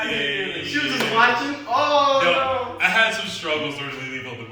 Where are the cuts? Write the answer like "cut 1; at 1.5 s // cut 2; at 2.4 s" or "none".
none